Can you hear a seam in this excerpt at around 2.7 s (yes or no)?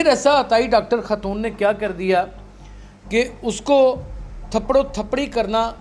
no